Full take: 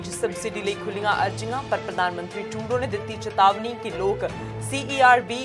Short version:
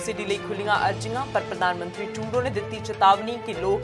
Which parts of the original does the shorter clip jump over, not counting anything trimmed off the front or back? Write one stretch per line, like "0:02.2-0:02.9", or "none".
none